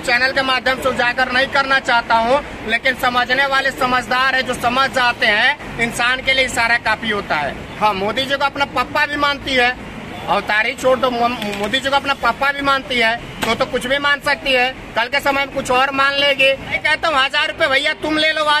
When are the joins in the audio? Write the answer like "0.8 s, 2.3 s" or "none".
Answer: 7.6 s, 16.8 s